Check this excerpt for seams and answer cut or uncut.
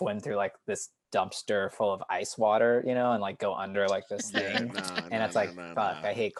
uncut